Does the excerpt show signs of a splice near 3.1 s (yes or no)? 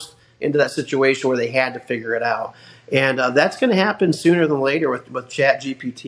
no